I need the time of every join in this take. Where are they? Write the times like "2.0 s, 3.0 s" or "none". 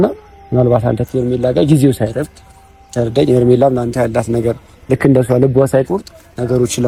none